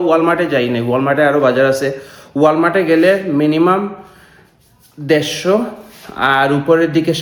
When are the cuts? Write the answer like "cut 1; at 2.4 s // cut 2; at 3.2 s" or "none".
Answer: none